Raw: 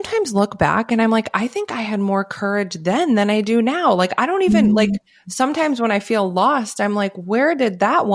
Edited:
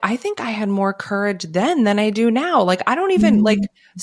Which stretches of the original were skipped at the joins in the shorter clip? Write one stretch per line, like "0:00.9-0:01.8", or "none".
none